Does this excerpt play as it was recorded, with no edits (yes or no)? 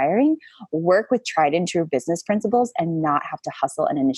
yes